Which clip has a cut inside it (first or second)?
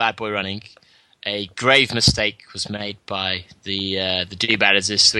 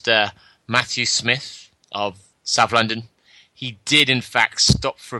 second